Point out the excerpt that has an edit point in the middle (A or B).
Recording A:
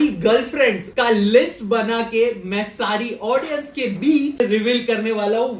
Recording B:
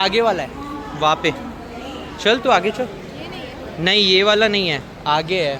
A